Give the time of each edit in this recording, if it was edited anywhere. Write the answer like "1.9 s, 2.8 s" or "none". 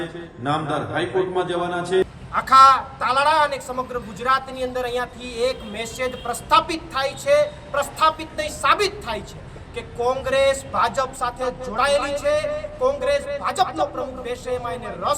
2.0 s